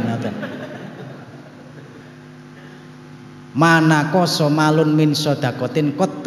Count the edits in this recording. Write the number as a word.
one